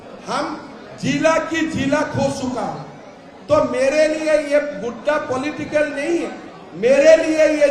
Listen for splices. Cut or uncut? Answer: uncut